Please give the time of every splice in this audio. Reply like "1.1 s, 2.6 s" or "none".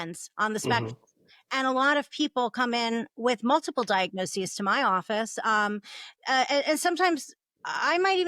none